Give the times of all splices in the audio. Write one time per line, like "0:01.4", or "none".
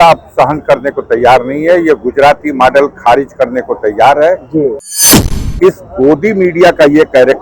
0:04.9